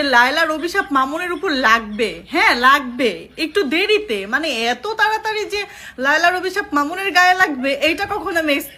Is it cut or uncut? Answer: uncut